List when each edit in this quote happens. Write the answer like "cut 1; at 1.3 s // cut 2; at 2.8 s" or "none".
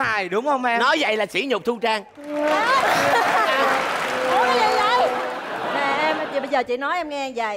cut 1; at 5.5 s